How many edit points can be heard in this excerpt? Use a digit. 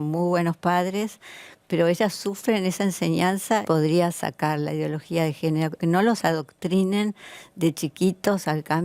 2